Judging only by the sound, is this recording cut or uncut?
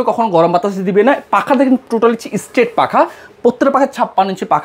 uncut